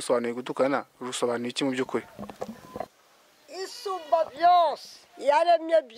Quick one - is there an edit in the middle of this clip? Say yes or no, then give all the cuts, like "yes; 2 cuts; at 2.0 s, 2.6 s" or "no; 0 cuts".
yes; 1 cut; at 2.9 s